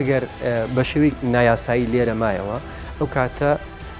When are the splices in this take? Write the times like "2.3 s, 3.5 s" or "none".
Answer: 1.2 s